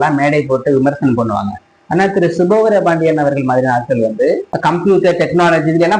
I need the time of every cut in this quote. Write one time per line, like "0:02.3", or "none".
0:04.5